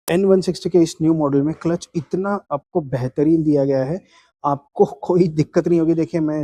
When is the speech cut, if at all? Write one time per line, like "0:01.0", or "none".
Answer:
none

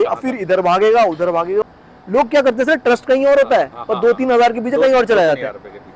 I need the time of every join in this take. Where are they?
0:01.6

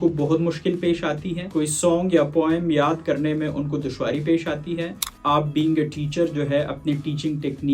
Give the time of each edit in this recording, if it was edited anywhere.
0:04.9

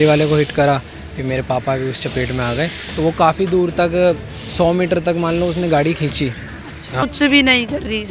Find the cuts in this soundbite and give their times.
0:07.0

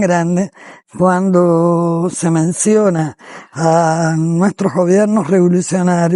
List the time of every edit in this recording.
none

